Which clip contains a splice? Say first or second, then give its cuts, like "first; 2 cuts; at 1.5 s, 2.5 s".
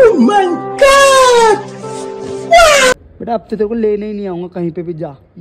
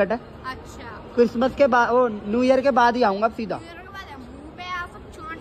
first; 1 cut; at 2.9 s